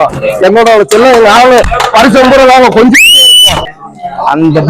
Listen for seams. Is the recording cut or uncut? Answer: cut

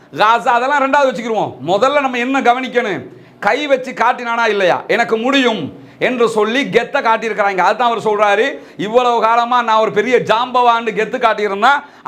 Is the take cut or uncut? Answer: uncut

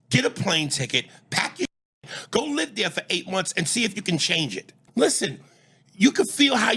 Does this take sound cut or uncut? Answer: cut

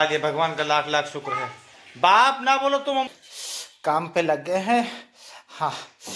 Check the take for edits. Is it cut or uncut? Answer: cut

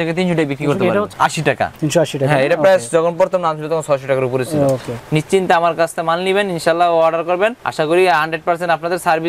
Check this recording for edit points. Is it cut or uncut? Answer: cut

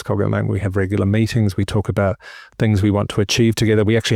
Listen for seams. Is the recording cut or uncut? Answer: uncut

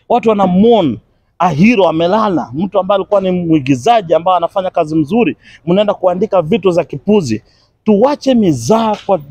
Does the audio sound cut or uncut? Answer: uncut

